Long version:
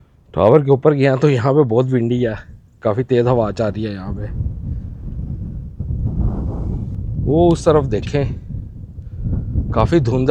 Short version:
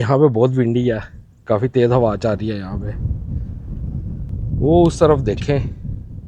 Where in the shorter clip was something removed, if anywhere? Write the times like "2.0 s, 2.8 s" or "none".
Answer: 4.3 s